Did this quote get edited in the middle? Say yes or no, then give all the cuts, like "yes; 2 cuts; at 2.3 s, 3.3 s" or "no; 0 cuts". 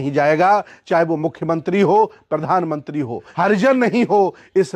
yes; 1 cut; at 3.3 s